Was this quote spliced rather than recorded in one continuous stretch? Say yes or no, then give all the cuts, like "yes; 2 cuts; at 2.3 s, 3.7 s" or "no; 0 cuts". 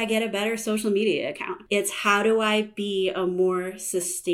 yes; 1 cut; at 1.5 s